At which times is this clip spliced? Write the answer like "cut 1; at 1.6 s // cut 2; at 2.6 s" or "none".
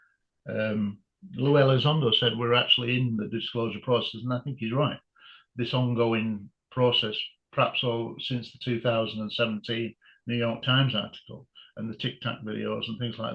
none

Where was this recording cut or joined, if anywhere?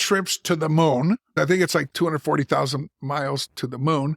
cut 1; at 1.3 s

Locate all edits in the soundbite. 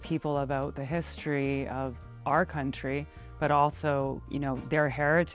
cut 1; at 4.2 s

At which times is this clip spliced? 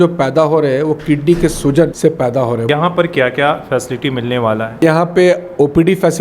cut 1; at 2.5 s // cut 2; at 4.8 s

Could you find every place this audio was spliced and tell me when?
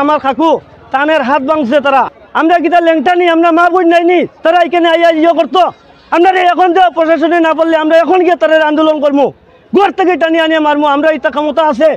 cut 1; at 2.2 s

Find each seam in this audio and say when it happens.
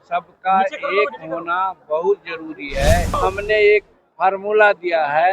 cut 1; at 3.2 s

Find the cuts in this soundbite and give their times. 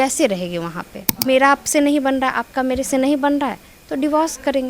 cut 1; at 1.2 s

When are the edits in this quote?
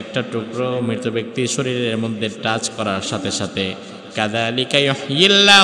none

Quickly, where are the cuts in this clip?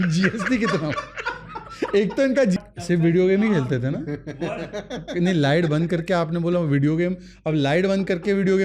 cut 1; at 2.6 s

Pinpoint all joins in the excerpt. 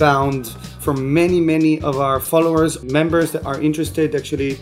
cut 1; at 0.8 s // cut 2; at 2.8 s

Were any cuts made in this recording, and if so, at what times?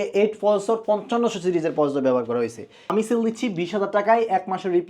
cut 1; at 2.9 s

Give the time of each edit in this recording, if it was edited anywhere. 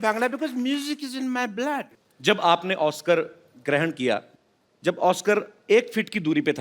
cut 1; at 2.0 s

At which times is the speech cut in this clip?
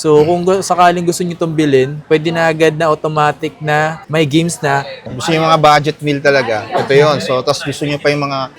cut 1; at 4.9 s

